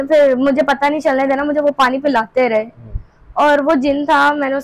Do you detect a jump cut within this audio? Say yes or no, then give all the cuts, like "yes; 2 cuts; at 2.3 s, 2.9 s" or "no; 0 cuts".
no; 0 cuts